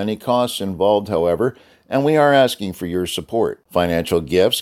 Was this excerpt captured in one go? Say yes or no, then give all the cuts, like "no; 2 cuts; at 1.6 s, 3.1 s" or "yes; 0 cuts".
yes; 0 cuts